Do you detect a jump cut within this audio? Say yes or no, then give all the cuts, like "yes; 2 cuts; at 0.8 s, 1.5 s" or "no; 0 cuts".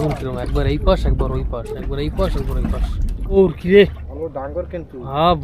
yes; 1 cut; at 3.4 s